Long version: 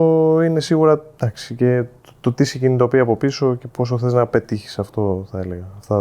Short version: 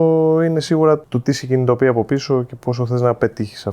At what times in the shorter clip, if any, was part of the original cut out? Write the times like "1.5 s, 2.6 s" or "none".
1.1 s